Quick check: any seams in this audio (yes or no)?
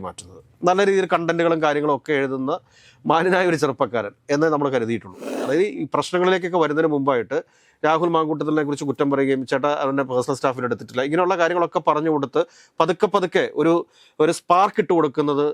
yes